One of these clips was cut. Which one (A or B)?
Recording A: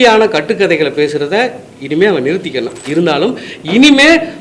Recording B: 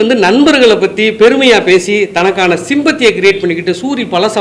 A